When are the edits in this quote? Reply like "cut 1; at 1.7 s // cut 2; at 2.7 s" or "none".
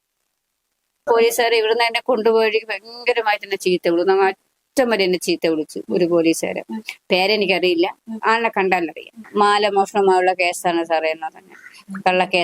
cut 1; at 1.0 s // cut 2; at 9.2 s

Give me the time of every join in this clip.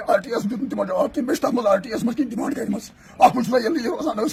none

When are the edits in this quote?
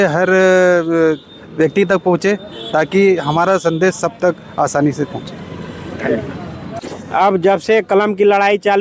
cut 1; at 6.6 s

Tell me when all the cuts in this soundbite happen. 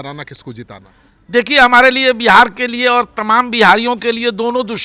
none

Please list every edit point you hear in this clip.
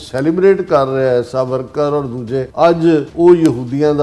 cut 1; at 2.5 s // cut 2; at 3.1 s

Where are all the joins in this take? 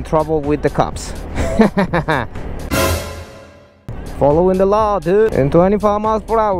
cut 1; at 5.3 s

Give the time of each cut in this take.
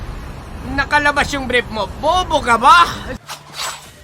cut 1; at 3.1 s

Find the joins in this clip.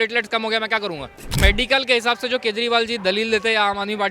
cut 1; at 1.3 s

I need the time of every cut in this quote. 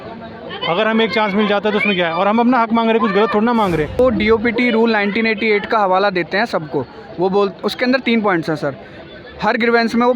cut 1; at 4.0 s

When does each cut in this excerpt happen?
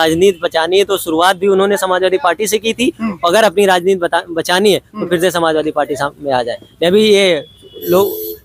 none

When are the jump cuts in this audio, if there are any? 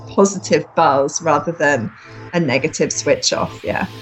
none

